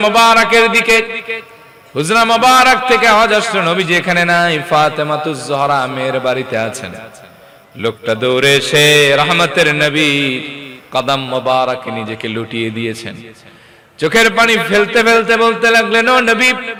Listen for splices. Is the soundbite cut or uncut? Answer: uncut